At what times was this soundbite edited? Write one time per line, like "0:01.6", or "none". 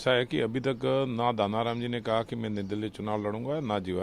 none